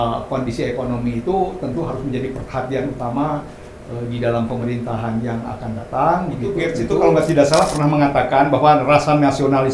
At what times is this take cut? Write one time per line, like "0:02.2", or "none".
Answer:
0:06.8